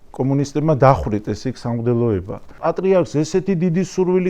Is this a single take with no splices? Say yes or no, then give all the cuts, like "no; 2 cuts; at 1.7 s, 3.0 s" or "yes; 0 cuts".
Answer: no; 1 cut; at 2.6 s